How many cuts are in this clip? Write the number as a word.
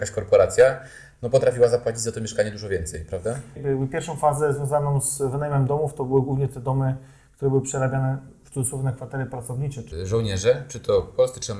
two